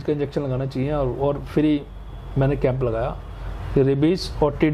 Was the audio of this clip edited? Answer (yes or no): no